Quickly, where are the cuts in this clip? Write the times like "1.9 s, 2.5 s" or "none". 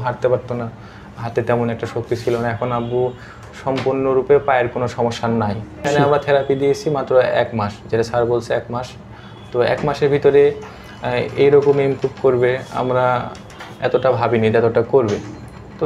5.9 s